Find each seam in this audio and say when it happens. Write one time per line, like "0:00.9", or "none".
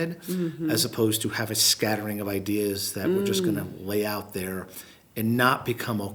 none